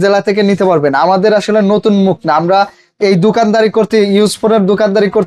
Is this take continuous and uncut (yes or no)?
yes